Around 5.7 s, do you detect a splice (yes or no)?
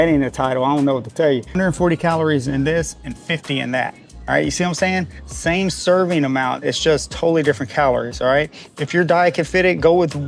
no